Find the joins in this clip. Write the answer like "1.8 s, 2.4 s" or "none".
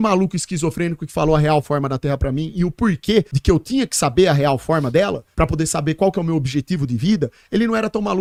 none

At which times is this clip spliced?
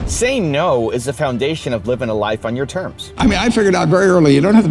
3.0 s

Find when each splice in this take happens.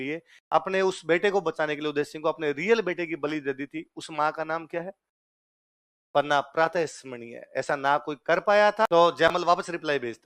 8.9 s

